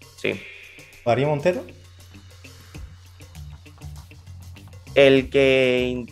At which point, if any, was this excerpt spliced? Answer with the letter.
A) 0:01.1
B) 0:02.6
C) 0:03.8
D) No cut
A